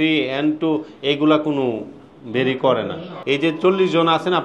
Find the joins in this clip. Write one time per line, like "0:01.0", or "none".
0:03.1